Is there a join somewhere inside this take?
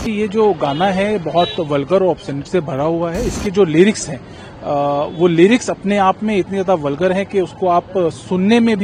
no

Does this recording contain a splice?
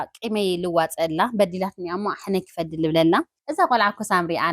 yes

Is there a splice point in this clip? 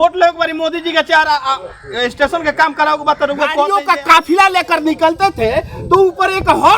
yes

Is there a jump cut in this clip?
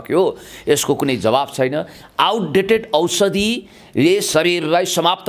no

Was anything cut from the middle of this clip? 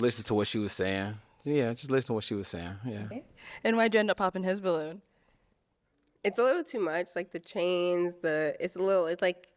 yes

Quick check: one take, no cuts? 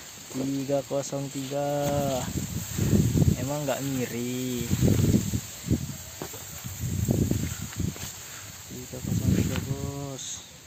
yes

